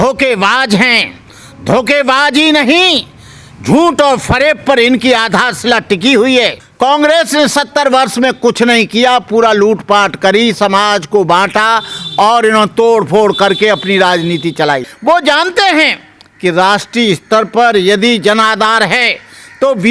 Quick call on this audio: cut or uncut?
cut